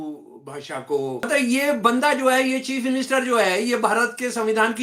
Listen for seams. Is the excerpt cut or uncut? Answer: cut